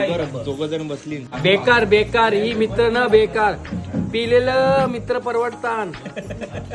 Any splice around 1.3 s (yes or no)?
yes